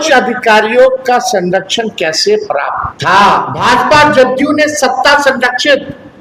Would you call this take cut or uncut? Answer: cut